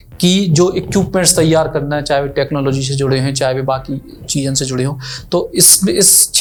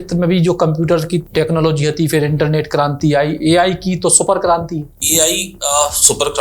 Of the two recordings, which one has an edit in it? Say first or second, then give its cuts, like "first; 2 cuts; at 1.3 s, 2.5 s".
second; 2 cuts; at 1.3 s, 5.0 s